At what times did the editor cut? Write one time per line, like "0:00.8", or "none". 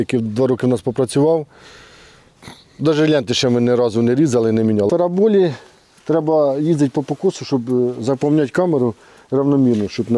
0:04.9